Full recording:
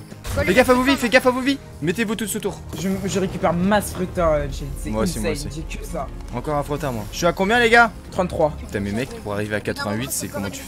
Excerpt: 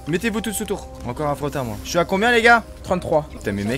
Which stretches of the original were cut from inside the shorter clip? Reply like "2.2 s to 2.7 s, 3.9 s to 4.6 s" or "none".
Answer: 2.7 s to 6.2 s